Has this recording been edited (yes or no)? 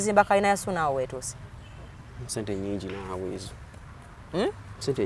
no